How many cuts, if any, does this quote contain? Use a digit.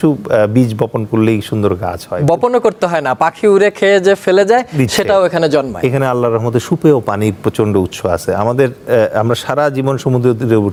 0